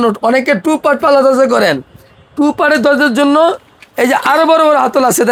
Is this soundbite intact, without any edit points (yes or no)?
yes